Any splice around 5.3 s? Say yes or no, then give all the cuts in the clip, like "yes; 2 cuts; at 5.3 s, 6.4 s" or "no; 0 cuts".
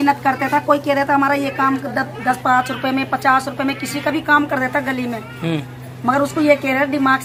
no; 0 cuts